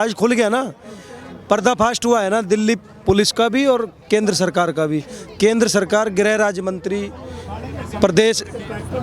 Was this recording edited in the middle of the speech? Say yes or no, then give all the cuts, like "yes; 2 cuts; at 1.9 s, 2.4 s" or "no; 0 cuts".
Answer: no; 0 cuts